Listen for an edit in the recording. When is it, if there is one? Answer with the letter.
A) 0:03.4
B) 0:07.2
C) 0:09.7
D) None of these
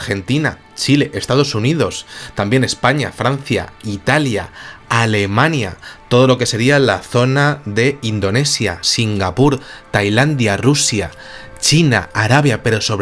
B